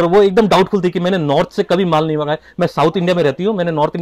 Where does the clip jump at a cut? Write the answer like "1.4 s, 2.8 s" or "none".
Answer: none